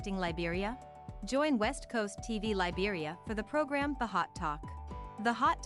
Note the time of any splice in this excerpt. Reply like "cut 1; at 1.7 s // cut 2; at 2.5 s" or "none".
cut 1; at 1.0 s